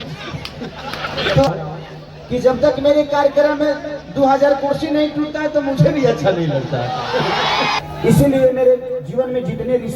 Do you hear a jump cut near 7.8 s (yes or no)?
yes